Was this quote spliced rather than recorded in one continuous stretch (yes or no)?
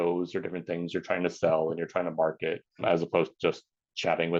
yes